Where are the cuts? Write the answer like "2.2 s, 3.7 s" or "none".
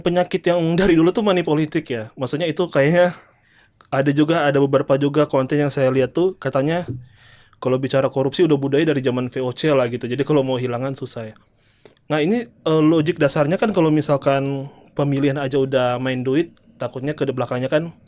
none